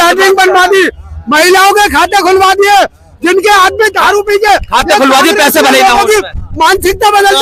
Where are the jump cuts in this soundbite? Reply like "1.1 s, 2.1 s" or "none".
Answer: none